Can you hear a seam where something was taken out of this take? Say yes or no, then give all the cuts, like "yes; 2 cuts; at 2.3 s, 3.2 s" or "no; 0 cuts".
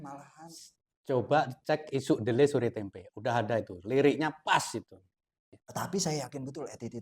yes; 1 cut; at 5.5 s